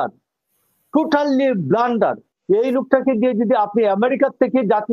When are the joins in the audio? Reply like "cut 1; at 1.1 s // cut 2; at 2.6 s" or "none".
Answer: cut 1; at 2.3 s